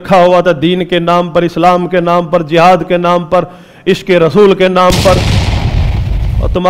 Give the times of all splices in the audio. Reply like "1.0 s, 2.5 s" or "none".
none